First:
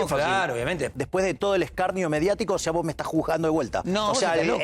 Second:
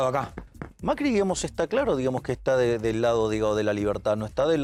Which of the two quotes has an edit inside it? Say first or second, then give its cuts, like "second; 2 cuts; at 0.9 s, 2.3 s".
first; 2 cuts; at 0.9 s, 3.8 s